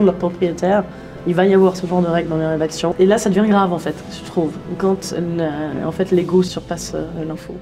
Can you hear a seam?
yes; 2 cuts; at 2.9 s, 6.5 s

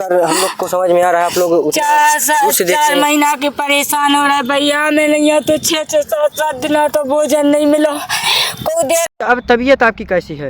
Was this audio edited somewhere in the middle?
yes; 1 cut; at 9.1 s

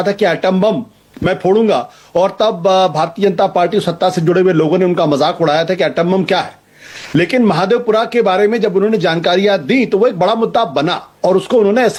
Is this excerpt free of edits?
yes; 0 cuts

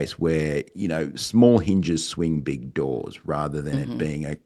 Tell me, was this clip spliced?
no; 0 cuts

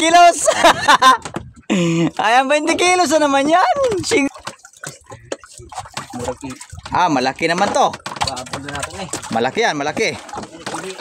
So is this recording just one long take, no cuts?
no; 1 cut; at 4.3 s

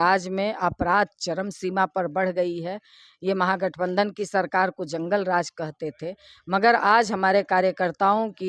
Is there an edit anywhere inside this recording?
no; 0 cuts

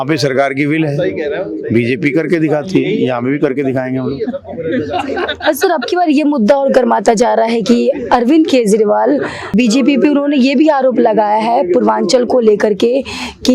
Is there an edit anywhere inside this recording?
no; 0 cuts

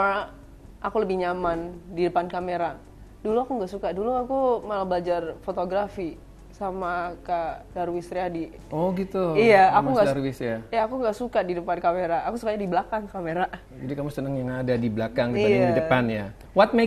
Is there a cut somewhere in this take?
no; 0 cuts

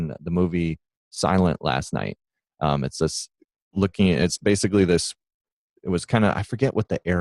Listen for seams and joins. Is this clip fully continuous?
yes; 0 cuts

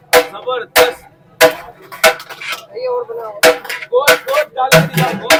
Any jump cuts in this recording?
no; 0 cuts

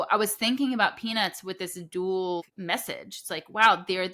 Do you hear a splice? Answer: yes; 1 cut; at 2.4 s

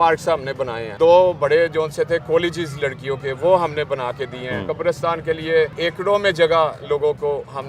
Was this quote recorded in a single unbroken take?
no; 3 cuts; at 0.9 s, 4.7 s, 5.7 s

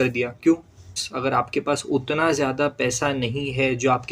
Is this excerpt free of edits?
no; 1 cut; at 1.1 s

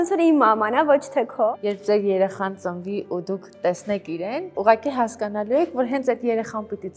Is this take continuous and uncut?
no; 1 cut; at 1.5 s

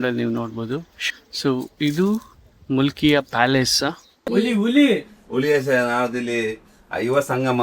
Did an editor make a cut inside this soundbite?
yes; 2 cuts; at 0.9 s, 4.3 s

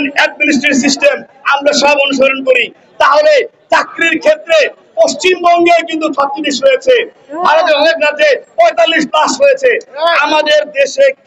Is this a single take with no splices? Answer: yes; 0 cuts

